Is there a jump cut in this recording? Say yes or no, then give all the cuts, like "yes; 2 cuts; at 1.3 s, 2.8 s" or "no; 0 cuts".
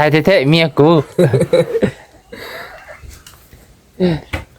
no; 0 cuts